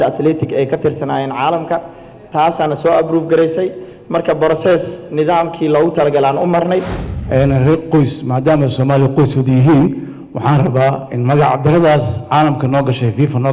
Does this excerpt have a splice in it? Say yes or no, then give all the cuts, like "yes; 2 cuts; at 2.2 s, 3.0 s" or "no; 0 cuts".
yes; 1 cut; at 7.0 s